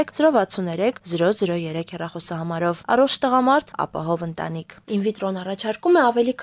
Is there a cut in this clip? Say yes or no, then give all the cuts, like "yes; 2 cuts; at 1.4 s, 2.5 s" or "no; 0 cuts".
yes; 1 cut; at 4.8 s